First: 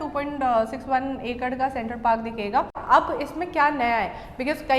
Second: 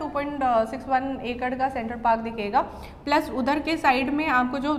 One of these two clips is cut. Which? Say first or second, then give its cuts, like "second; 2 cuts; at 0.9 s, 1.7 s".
first; 1 cut; at 2.8 s